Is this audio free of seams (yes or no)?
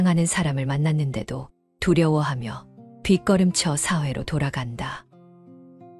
no